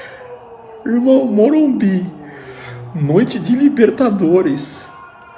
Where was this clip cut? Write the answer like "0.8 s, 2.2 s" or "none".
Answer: none